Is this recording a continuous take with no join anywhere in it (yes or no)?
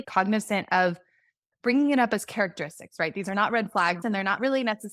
no